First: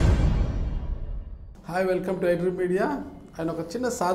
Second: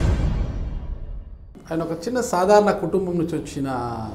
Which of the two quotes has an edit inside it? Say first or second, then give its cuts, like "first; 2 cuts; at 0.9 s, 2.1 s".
second; 1 cut; at 1.5 s